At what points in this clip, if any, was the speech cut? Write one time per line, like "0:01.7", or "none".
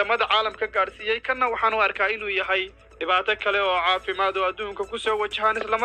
none